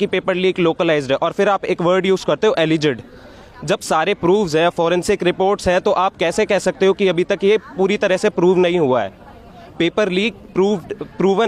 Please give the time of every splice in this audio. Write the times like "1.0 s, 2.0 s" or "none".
none